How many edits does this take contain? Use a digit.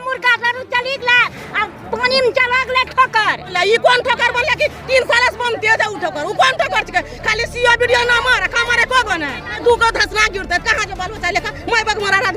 2